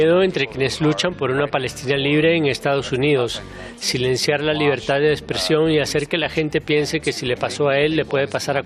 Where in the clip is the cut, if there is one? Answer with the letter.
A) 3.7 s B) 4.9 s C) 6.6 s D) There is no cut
D